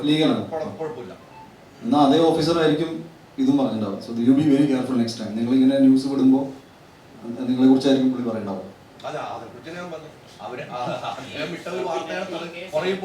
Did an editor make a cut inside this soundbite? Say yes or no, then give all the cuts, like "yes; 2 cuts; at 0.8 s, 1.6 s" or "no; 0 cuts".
no; 0 cuts